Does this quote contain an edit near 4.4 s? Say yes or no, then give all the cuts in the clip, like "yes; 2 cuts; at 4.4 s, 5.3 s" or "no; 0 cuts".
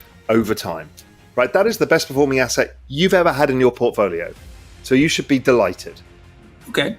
no; 1 cut; at 6.1 s